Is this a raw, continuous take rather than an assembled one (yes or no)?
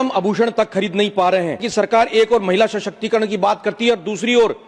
no